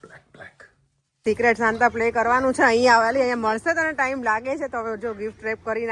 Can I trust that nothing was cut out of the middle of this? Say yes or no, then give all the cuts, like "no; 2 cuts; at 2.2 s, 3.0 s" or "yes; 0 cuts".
no; 1 cut; at 1.2 s